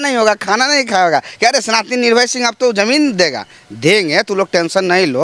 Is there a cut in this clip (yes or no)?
no